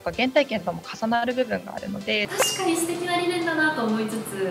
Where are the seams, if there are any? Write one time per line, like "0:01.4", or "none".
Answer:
0:02.3

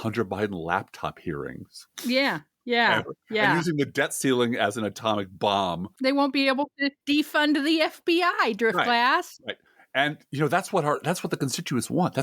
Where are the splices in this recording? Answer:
0:05.9
0:06.9

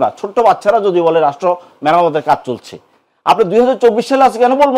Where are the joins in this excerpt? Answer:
none

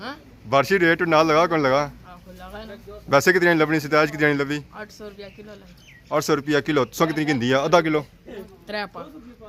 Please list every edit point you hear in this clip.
none

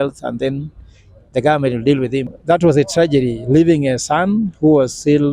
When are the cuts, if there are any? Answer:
0:02.3

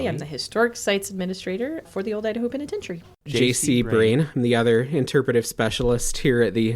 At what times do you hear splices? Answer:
0:01.9
0:03.3

